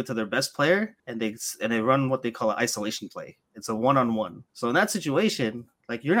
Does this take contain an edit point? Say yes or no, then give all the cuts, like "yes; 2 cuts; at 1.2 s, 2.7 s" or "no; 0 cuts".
yes; 2 cuts; at 1.0 s, 4.4 s